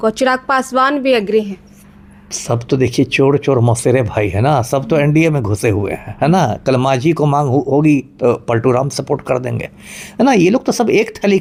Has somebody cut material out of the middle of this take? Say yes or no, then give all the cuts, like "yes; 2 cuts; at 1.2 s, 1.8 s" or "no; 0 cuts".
no; 0 cuts